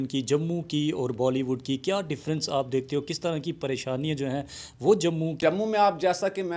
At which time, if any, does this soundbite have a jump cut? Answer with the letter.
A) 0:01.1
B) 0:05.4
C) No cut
B